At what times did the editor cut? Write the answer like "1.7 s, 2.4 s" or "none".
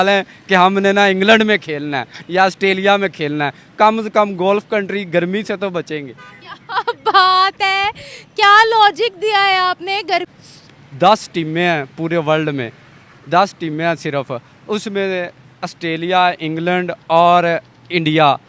10.3 s